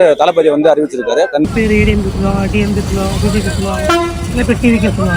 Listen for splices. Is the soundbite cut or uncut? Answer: cut